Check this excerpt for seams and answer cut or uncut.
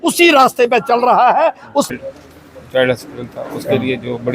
cut